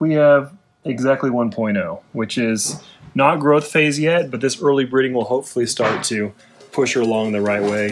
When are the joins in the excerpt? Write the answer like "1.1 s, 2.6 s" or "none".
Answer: none